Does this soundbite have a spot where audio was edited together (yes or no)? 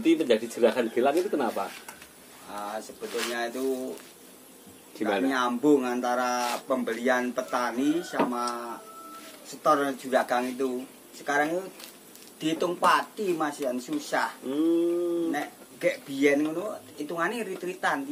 no